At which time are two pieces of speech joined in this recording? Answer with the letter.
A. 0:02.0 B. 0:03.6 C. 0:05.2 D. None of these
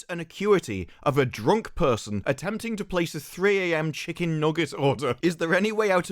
C